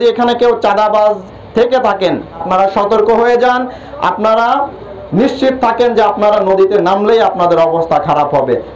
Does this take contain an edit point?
yes; 1 cut; at 2.4 s

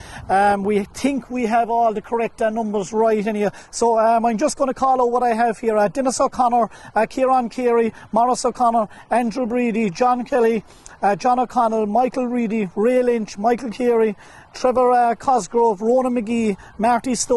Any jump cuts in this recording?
no; 0 cuts

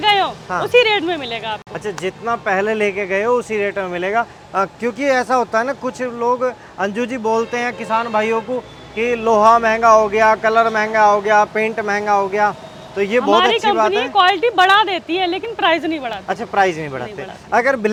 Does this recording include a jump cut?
no; 0 cuts

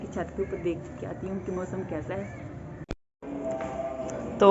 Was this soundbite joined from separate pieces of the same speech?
yes; 1 cut; at 2.8 s

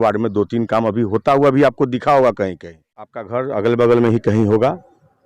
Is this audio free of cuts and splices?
no; 1 cut; at 3.2 s

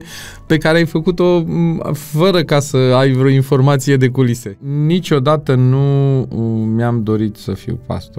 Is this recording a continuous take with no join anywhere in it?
no; 1 cut; at 4.6 s

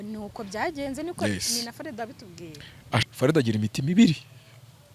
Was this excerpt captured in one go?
no; 1 cut; at 3.0 s

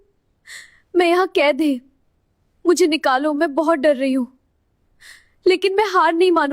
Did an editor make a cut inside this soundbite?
no; 0 cuts

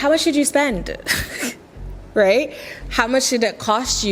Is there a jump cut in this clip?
no; 0 cuts

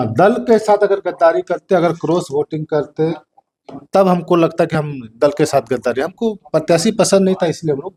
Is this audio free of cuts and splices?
yes; 0 cuts

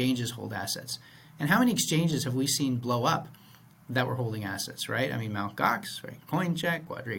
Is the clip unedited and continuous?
yes; 0 cuts

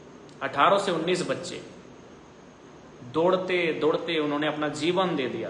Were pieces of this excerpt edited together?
no; 0 cuts

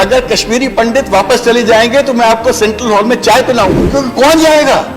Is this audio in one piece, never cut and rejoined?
no; 1 cut; at 3.8 s

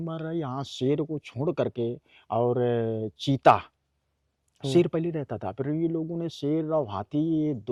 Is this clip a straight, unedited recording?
yes; 0 cuts

